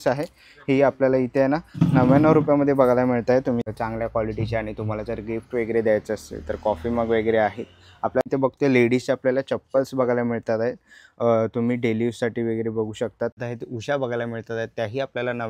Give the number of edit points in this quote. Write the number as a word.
three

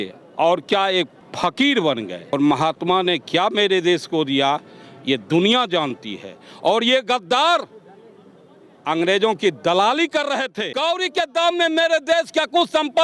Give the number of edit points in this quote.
three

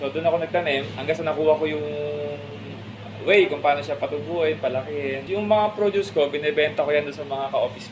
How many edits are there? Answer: two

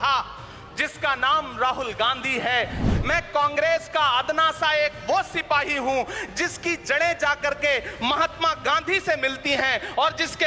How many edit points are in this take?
one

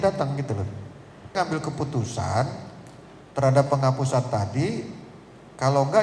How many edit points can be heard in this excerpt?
one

